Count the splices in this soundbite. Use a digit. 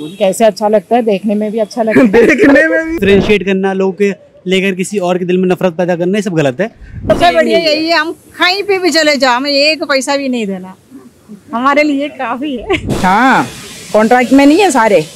3